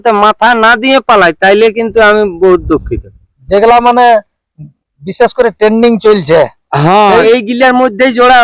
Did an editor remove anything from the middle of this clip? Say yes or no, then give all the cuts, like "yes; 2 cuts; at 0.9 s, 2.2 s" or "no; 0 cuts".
yes; 2 cuts; at 3.3 s, 7.2 s